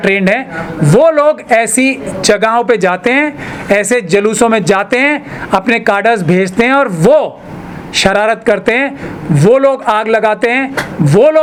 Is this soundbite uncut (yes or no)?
yes